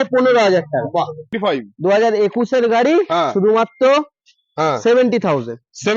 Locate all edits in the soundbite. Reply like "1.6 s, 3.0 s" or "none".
1.3 s